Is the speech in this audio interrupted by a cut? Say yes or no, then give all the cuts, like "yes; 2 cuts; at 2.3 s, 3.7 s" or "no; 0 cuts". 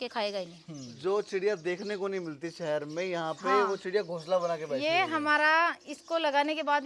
yes; 1 cut; at 0.9 s